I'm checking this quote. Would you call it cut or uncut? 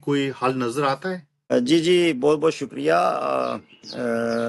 uncut